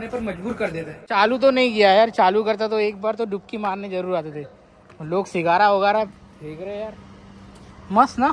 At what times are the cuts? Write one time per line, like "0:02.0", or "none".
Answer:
0:01.1